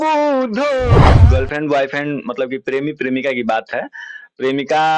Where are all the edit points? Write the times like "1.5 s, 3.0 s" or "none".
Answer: 1.0 s

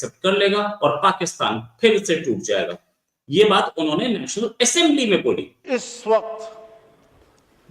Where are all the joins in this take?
5.5 s

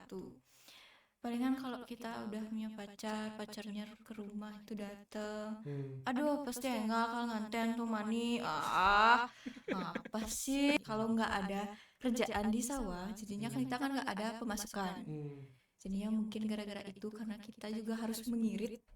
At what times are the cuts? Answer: 10.8 s

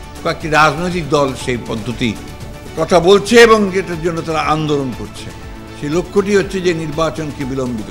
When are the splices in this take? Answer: 2.8 s

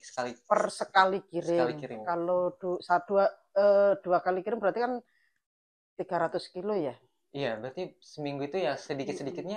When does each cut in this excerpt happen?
none

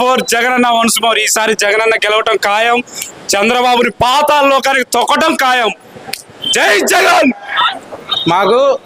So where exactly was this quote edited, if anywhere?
7.7 s

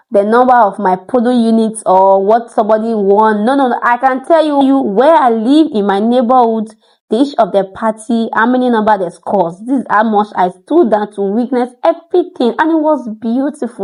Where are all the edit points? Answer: none

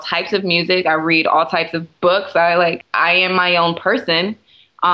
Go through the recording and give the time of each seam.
2.8 s

